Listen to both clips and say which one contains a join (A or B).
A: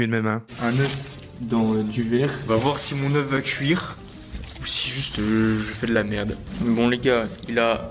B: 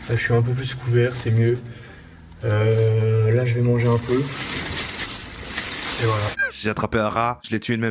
A